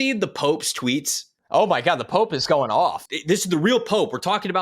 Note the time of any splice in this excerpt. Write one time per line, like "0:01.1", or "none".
0:03.1